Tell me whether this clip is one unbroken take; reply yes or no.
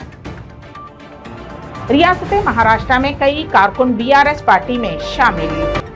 no